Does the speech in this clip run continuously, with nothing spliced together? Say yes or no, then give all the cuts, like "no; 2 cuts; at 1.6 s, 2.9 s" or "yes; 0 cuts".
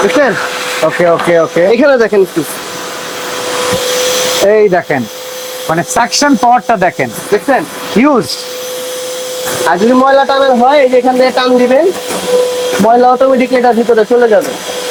yes; 0 cuts